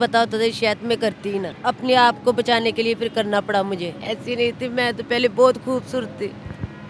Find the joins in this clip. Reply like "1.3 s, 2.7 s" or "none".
1.5 s, 4.0 s